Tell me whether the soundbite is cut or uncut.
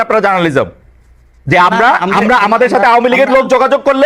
uncut